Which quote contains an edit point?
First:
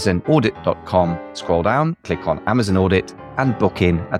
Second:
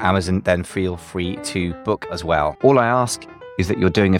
second; 1 cut; at 2.1 s

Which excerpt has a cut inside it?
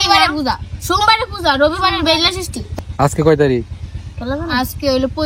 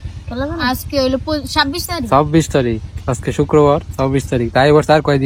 first; 1 cut; at 2.6 s

